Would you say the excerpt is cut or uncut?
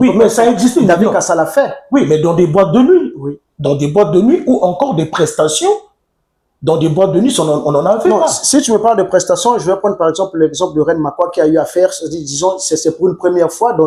uncut